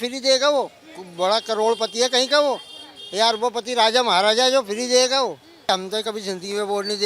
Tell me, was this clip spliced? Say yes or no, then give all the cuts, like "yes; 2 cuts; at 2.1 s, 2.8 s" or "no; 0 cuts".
yes; 1 cut; at 5.7 s